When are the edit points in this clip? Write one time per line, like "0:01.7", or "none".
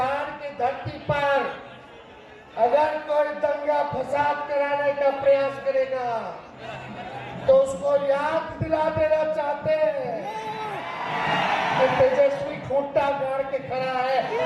none